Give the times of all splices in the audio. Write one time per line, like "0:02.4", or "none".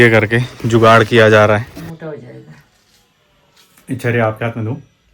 0:01.8